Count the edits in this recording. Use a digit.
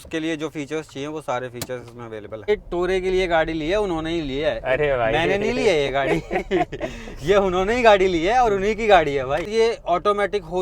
2